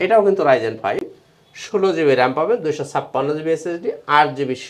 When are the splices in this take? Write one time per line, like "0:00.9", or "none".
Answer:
none

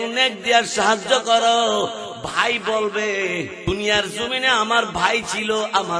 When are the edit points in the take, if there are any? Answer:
0:03.6

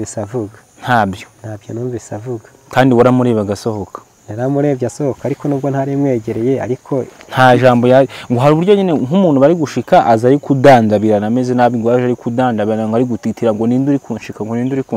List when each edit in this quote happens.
none

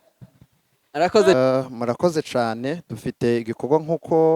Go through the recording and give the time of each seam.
0:01.3

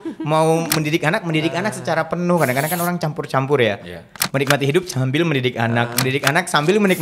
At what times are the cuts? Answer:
none

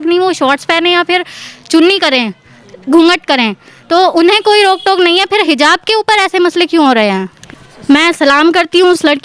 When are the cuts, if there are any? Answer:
0:07.3

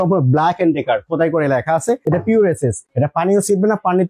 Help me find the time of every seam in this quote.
0:02.0
0:02.8

